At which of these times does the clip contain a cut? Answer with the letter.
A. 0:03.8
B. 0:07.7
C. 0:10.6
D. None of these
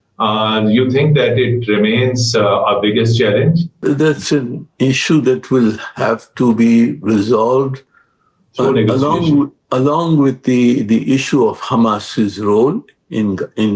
A